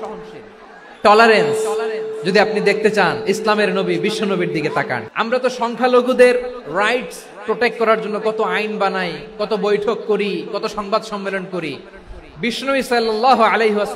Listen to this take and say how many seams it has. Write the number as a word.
one